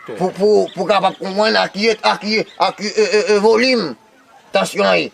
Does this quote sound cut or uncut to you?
cut